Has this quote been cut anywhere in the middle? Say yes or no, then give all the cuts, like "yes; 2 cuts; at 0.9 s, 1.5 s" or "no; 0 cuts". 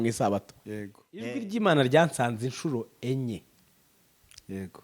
yes; 1 cut; at 1.2 s